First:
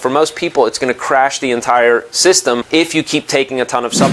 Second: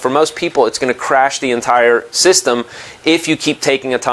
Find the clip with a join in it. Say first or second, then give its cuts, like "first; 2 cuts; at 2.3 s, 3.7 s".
first; 1 cut; at 2.6 s